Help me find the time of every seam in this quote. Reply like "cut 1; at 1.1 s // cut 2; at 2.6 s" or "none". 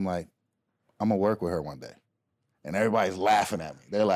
none